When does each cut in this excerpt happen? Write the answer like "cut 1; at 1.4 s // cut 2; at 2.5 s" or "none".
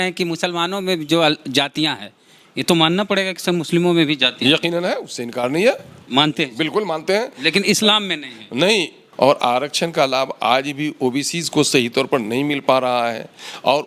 cut 1; at 9.0 s